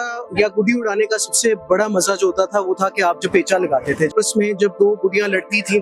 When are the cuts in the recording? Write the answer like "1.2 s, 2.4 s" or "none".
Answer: 4.1 s